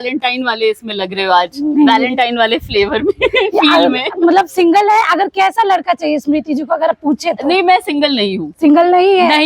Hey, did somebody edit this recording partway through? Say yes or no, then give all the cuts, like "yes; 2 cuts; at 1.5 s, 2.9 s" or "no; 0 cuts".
no; 0 cuts